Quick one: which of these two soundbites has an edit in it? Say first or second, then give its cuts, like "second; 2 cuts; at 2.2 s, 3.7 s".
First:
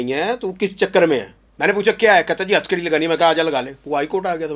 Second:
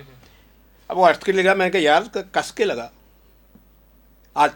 first; 1 cut; at 1.4 s